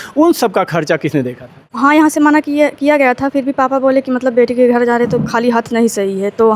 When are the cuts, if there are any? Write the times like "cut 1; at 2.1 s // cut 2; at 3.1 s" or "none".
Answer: cut 1; at 1.7 s